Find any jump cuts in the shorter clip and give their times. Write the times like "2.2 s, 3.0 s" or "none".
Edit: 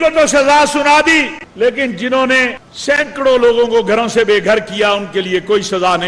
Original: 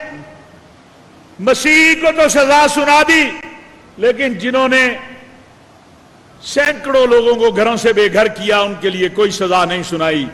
1.4 s, 2.7 s